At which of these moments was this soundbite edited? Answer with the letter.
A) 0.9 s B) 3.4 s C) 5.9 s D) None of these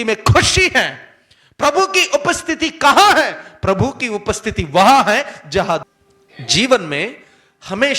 C